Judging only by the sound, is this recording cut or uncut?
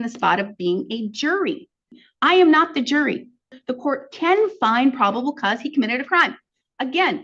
cut